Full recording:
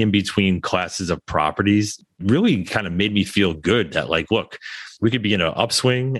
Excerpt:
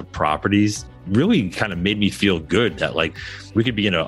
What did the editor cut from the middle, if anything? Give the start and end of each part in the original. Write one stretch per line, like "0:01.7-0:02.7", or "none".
0:04.2-0:04.6